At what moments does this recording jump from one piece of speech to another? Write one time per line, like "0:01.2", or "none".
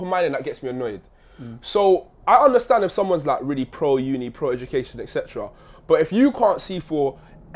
none